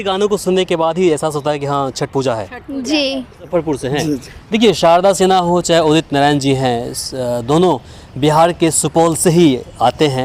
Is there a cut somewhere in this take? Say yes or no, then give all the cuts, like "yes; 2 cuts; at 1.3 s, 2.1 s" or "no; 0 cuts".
yes; 1 cut; at 3.5 s